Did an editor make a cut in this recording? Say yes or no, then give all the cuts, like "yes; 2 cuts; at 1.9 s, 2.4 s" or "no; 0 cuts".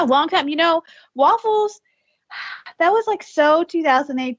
no; 0 cuts